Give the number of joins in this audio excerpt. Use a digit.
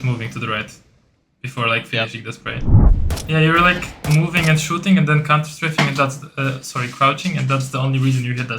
1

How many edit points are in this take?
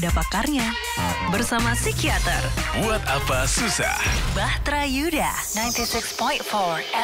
0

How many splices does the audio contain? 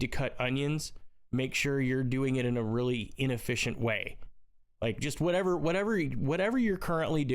0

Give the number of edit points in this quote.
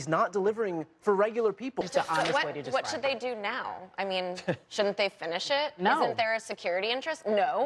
1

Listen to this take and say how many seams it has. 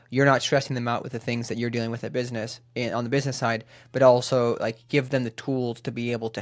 0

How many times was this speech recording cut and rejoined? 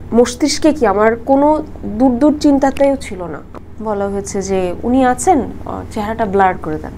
1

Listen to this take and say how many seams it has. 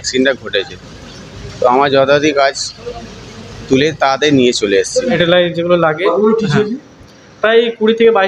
1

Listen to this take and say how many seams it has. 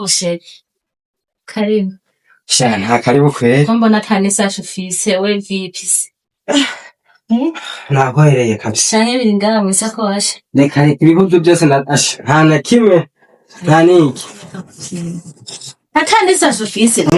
0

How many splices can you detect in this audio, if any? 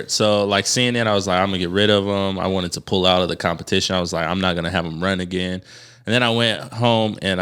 0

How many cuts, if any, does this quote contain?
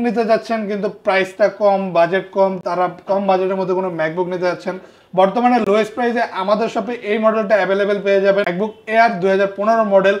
0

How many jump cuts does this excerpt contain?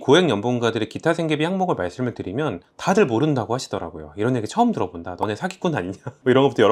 0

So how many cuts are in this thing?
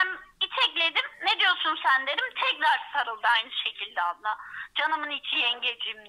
0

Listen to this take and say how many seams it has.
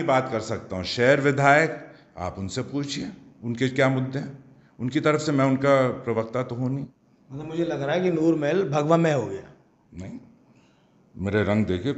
1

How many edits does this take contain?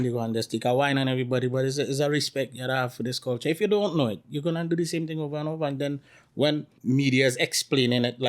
1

